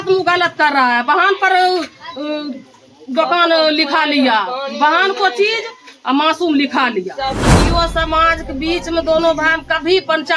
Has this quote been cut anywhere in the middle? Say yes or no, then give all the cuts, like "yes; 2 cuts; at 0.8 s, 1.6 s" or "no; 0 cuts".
yes; 1 cut; at 7.6 s